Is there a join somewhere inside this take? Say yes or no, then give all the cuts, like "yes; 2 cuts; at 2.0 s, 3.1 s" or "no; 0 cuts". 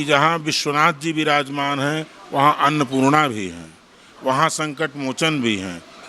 no; 0 cuts